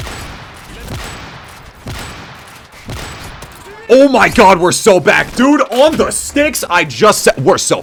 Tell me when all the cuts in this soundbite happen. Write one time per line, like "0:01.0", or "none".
none